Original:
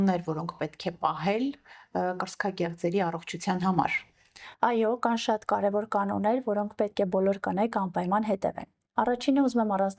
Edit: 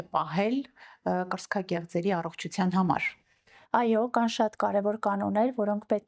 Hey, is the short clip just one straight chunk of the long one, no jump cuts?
yes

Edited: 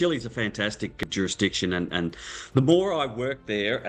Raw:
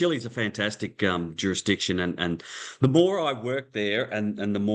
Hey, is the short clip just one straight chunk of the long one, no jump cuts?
no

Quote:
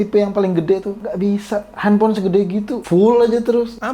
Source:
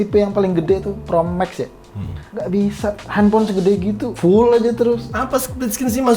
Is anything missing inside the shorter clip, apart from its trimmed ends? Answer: yes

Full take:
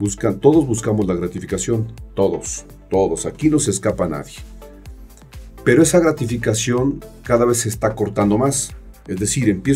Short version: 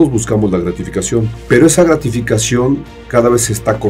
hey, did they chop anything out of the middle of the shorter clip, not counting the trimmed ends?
yes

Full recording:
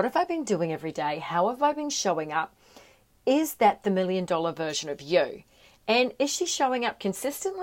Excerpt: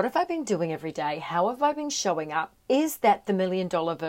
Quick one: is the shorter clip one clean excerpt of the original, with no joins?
no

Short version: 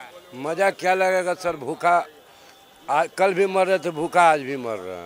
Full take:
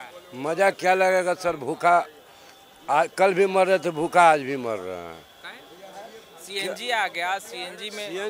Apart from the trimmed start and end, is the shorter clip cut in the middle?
no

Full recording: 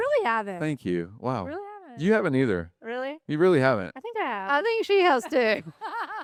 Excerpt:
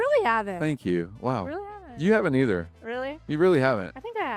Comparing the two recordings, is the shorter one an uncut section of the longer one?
yes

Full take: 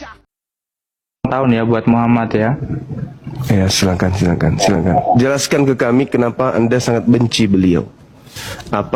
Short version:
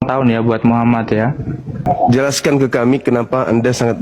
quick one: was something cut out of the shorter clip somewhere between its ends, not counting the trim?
yes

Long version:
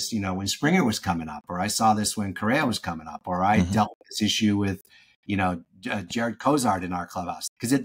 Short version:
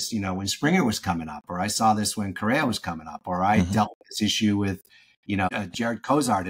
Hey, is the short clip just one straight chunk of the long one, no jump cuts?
no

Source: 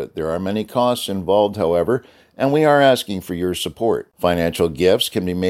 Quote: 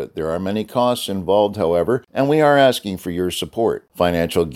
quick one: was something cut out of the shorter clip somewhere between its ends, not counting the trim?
yes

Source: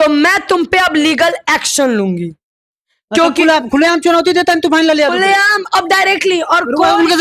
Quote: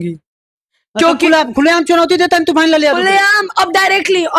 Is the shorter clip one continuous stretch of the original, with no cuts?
yes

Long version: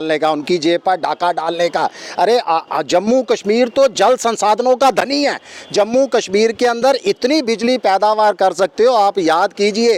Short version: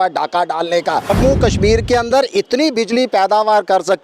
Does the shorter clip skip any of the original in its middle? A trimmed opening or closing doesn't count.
yes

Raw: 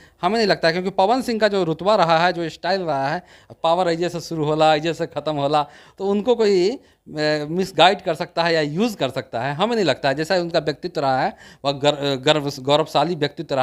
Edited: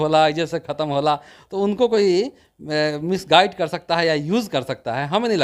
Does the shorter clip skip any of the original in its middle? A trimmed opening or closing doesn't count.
no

